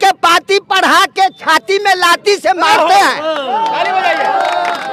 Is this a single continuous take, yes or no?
yes